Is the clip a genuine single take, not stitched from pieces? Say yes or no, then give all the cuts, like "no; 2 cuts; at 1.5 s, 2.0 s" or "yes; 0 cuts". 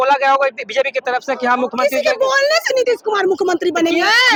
yes; 0 cuts